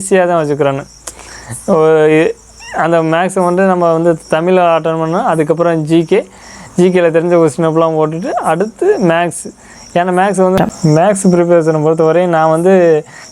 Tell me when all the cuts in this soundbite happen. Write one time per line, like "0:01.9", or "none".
0:10.6